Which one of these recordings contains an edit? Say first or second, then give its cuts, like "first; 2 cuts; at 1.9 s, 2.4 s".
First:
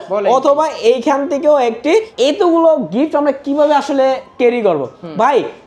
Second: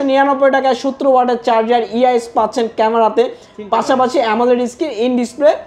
first; 1 cut; at 2.1 s